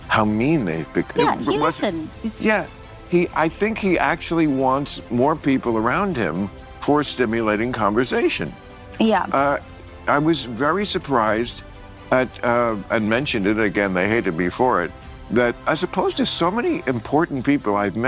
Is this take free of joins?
no; 1 cut; at 1.1 s

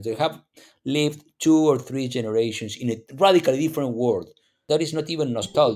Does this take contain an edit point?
yes; 1 cut; at 4.6 s

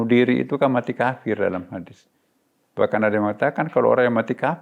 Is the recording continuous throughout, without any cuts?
yes; 0 cuts

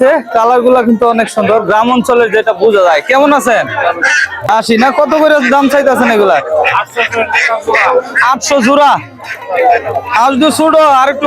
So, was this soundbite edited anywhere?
yes; 1 cut; at 4.4 s

